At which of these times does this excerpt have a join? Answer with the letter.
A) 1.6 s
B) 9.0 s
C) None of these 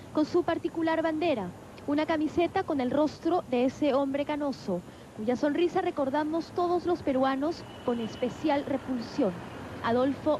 C